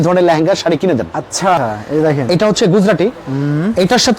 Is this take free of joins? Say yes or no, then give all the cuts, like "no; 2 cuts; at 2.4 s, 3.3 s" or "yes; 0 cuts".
no; 1 cut; at 1.6 s